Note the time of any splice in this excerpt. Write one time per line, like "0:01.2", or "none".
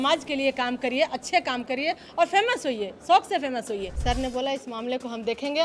0:03.9